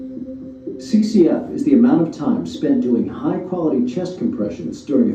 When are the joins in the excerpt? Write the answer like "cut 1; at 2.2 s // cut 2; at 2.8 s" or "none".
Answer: cut 1; at 0.9 s

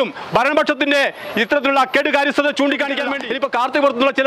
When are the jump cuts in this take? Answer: cut 1; at 3.2 s

